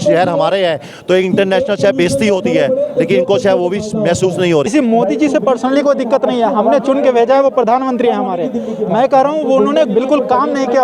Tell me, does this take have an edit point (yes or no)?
yes